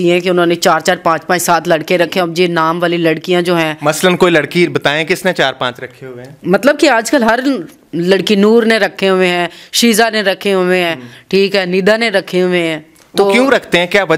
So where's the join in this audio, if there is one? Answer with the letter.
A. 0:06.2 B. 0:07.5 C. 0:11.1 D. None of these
D